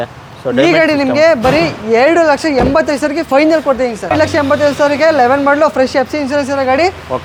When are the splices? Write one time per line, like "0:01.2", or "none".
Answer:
none